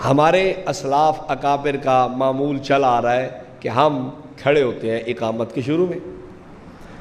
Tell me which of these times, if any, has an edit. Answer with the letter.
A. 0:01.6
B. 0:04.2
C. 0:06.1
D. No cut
C